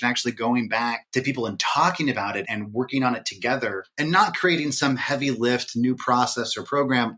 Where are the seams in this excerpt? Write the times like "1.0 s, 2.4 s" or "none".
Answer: 1.0 s, 2.4 s, 3.8 s